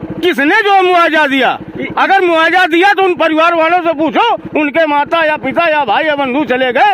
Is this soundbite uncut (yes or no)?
yes